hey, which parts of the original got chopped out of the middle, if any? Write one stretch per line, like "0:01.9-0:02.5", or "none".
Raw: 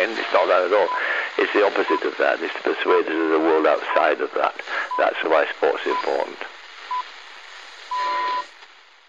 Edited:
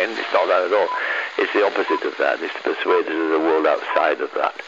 none